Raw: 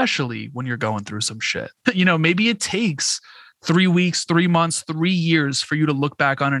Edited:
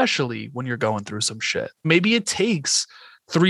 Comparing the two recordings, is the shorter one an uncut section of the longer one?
no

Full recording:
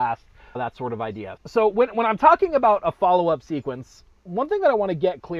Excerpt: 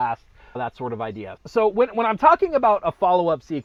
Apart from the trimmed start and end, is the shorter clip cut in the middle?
no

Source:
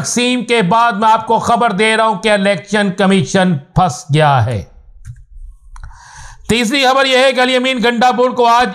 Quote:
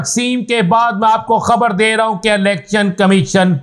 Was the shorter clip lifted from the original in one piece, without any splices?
yes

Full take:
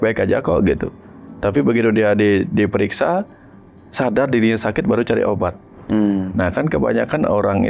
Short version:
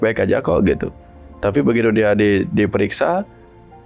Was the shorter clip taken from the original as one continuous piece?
yes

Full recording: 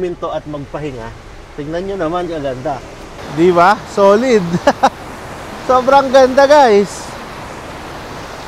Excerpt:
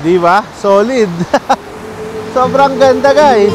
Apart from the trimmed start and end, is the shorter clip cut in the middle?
no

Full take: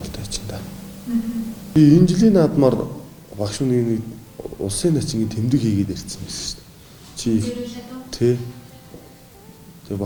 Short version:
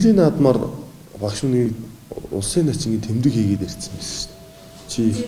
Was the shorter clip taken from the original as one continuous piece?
no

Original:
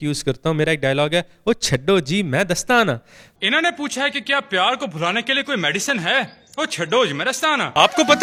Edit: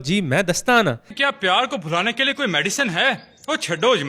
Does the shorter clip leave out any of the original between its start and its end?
yes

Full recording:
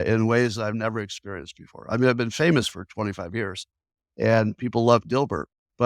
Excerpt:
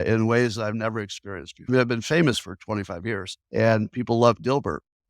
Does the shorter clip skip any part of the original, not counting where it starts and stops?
yes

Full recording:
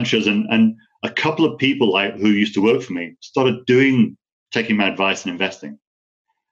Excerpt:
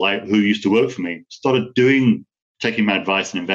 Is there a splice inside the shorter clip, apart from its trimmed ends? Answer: no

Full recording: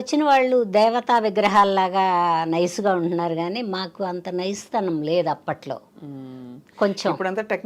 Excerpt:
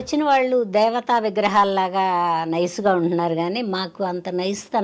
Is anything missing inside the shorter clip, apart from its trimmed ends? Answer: no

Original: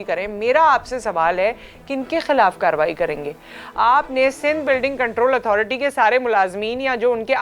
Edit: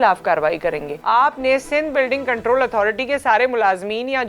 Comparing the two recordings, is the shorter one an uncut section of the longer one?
no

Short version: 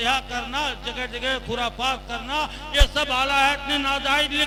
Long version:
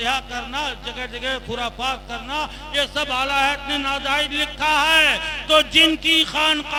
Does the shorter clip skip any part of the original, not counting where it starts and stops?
no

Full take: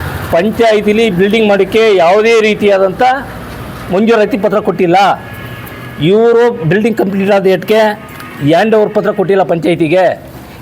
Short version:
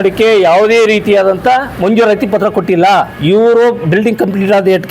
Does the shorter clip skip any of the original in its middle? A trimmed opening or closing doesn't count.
yes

